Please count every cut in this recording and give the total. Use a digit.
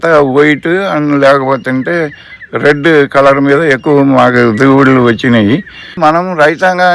1